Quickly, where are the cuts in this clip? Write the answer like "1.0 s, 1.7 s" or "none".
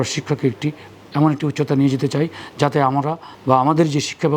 3.3 s